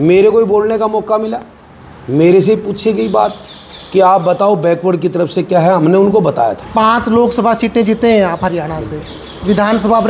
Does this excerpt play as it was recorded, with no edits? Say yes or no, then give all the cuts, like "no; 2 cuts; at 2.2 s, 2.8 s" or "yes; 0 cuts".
no; 1 cut; at 6.6 s